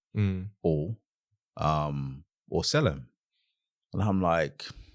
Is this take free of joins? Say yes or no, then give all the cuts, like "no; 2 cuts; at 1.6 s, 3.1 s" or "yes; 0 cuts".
yes; 0 cuts